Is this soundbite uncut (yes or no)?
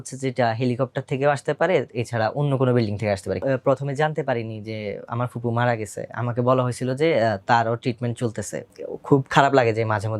no